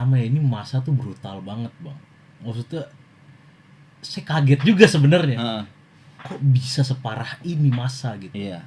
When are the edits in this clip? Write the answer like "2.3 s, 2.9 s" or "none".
none